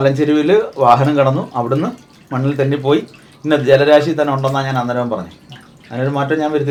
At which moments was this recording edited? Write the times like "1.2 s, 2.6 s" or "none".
none